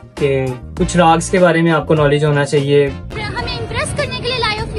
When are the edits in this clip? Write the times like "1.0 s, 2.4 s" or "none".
3.0 s